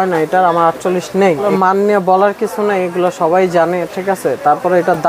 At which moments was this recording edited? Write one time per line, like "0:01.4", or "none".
0:01.5

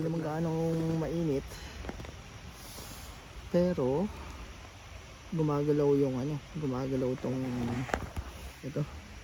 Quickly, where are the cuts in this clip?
none

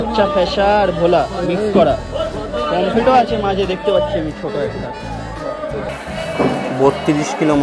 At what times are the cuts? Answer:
0:05.9

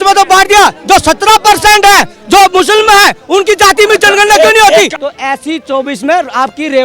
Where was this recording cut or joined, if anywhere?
0:04.9

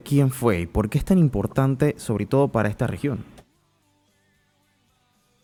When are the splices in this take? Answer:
none

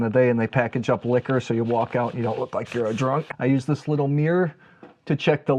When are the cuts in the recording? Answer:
0:03.3

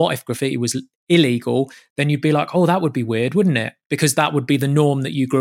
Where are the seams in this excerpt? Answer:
none

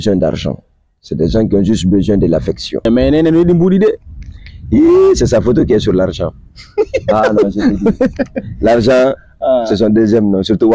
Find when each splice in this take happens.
0:02.8

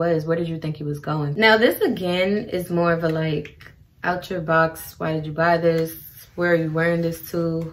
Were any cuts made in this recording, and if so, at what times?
0:01.3

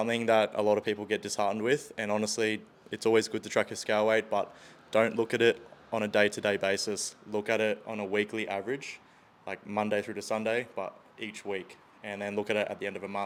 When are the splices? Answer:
none

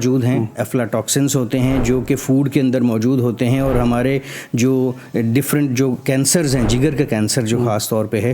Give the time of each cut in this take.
none

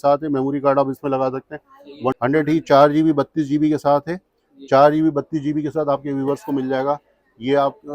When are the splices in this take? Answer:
0:02.2

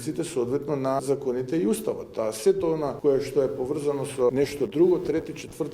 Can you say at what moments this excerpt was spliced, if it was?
0:01.0
0:02.9
0:04.3

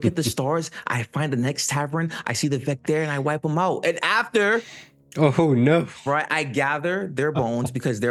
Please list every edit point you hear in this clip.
none

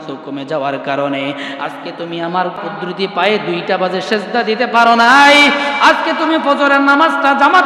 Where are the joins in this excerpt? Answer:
0:02.6

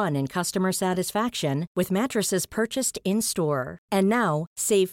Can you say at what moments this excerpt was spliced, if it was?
none

